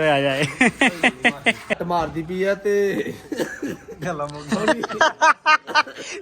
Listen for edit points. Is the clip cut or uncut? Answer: cut